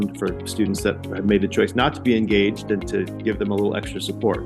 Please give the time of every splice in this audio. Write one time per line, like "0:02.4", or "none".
0:01.0